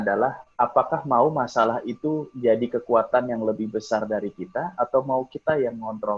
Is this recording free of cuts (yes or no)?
yes